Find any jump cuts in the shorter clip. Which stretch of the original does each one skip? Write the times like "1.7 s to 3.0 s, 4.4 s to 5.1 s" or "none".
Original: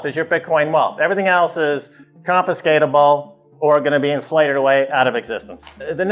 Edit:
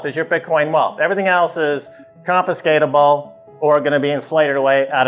none

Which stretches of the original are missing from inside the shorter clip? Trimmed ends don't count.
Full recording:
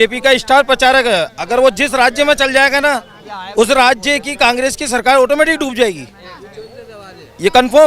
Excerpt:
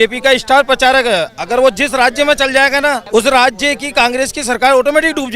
3.0 s to 3.5 s

